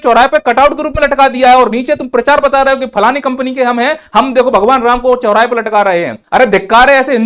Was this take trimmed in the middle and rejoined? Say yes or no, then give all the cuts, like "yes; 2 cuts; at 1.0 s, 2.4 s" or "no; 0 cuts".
yes; 1 cut; at 6.2 s